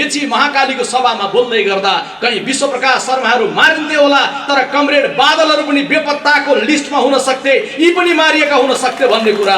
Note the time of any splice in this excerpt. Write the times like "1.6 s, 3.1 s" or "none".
none